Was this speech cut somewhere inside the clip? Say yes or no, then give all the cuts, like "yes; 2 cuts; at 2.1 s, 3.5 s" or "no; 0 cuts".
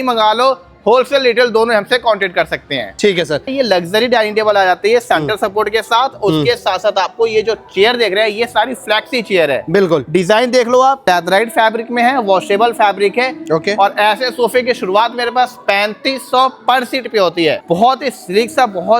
yes; 3 cuts; at 3.5 s, 11.0 s, 17.6 s